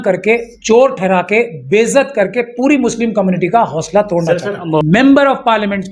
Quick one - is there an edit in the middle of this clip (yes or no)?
yes